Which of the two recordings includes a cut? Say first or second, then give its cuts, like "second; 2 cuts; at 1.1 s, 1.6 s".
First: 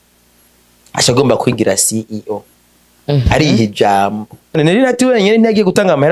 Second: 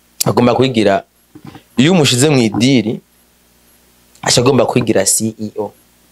first; 1 cut; at 4.6 s